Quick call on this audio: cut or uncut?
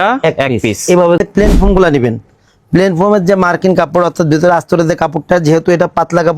cut